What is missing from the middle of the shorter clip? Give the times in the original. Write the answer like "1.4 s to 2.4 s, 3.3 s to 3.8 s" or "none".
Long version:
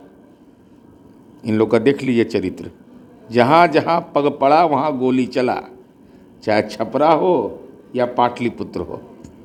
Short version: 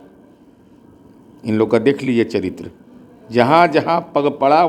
none

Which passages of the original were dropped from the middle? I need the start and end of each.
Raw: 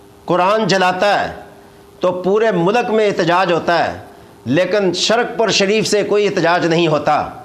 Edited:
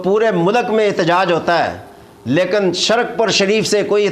none

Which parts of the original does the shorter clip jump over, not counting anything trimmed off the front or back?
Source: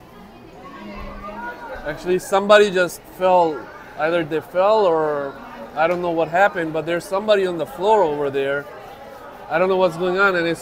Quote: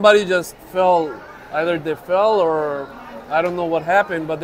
none

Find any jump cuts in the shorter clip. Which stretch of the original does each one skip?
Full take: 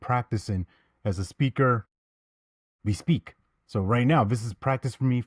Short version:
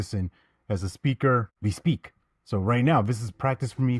1.9 s to 2.7 s

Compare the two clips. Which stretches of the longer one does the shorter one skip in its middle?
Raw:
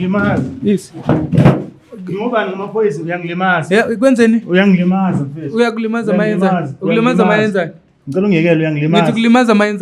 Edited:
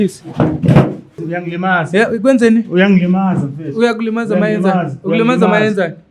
1.9 s to 3.0 s

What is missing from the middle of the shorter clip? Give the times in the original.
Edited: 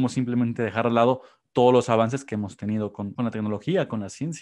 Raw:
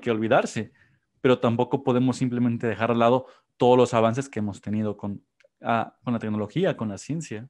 5.1 s to 6.0 s

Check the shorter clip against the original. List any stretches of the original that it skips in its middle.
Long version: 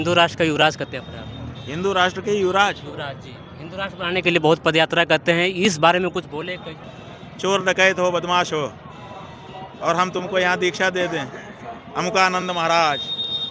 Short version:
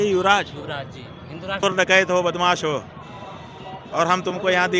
3.9 s to 7.5 s

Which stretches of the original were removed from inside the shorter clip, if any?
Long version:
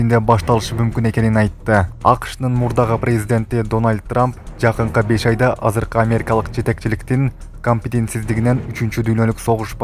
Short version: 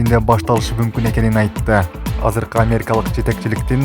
2.1 s to 5.5 s

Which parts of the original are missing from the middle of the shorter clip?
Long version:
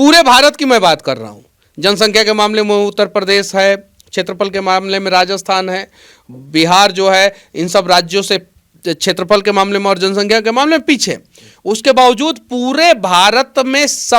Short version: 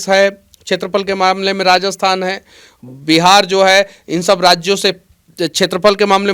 none

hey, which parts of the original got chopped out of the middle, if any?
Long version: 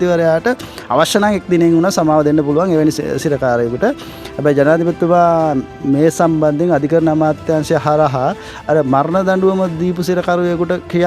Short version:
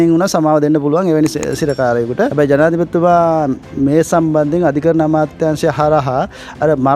3.9 s to 4.4 s

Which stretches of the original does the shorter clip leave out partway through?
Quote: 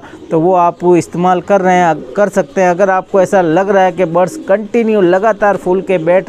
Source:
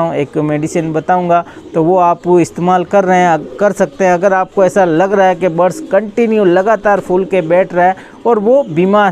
none

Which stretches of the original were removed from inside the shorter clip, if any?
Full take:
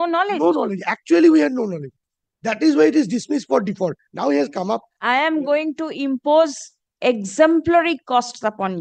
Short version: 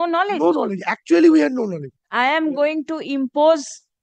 2.0 s to 4.9 s

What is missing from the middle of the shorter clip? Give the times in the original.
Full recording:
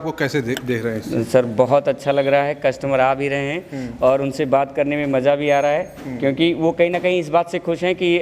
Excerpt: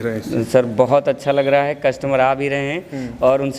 none

